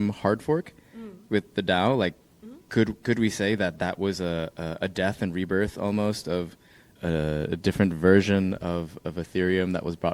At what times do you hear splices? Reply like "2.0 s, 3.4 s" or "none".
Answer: 6.9 s